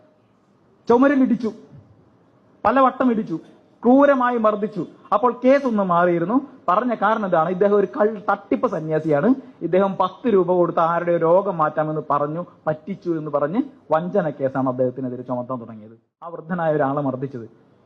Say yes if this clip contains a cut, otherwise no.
yes